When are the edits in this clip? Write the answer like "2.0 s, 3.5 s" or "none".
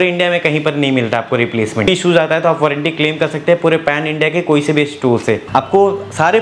1.9 s, 5.5 s

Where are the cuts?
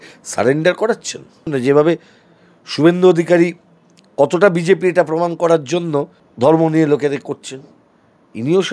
1.5 s, 6.2 s

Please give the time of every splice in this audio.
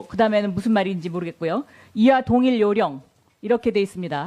2.0 s

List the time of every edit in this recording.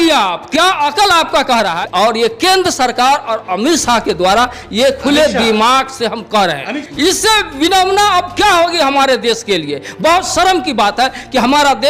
1.8 s, 6.8 s

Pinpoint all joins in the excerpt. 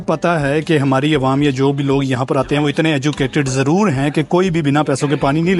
none

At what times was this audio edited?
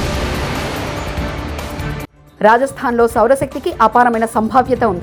none

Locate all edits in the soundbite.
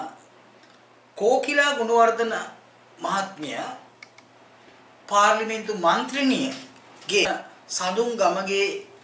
7.2 s

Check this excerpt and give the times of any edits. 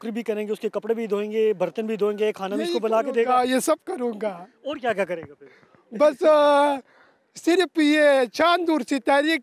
none

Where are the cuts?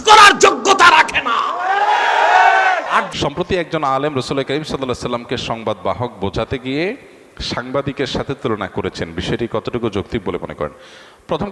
3.1 s

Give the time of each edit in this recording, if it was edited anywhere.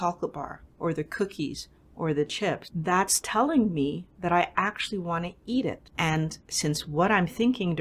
2.7 s, 6.1 s

